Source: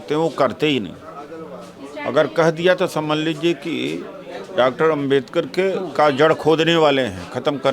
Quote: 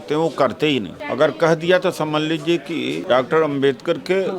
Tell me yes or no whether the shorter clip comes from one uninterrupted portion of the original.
no